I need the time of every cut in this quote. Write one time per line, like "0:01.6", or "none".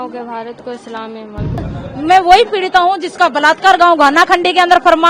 0:01.7

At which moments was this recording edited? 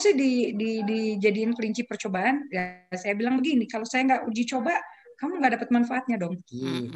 none

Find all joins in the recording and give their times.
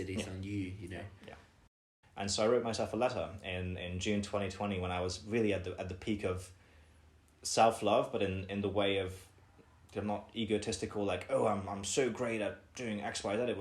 0:01.8

